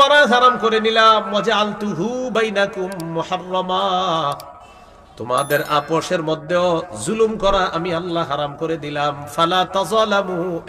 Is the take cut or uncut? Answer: uncut